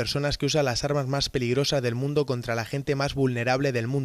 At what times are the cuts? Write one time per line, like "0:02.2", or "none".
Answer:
0:01.6